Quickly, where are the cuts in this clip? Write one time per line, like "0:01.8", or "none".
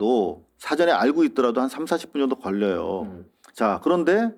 none